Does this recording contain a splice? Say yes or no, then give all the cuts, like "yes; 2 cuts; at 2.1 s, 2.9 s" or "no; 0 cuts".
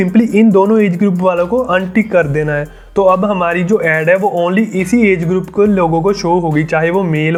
no; 0 cuts